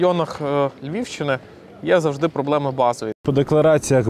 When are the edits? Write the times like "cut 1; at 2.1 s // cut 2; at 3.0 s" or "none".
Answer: cut 1; at 3.2 s